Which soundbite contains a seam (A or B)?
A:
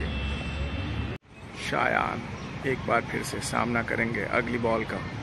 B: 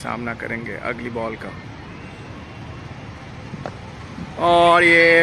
A